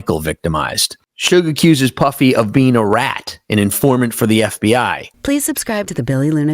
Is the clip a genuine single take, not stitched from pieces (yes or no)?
no